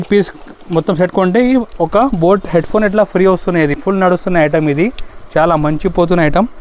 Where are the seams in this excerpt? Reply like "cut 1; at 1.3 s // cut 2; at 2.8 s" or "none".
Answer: none